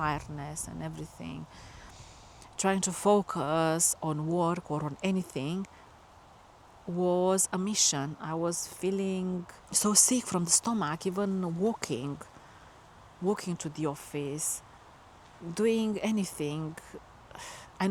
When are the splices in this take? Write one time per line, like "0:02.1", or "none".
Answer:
none